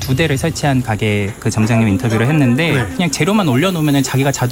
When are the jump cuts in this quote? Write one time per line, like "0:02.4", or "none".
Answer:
0:02.9